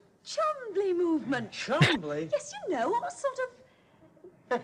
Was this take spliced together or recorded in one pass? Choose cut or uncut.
uncut